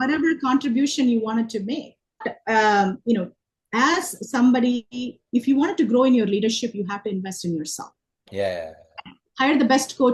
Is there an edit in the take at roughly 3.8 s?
no; 1 cut; at 2.3 s

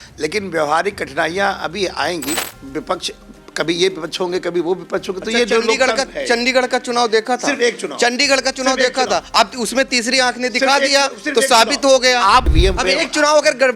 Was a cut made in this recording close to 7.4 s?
no; 2 cuts; at 2.5 s, 12.5 s

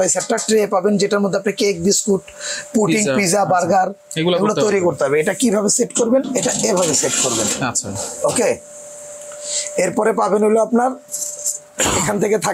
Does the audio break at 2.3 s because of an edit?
no; 0 cuts

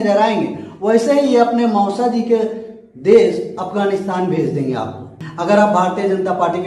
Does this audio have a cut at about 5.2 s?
yes; 1 cut; at 5.2 s

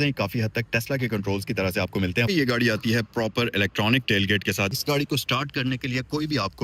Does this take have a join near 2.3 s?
yes; 2 cuts; at 2.3 s, 4.8 s

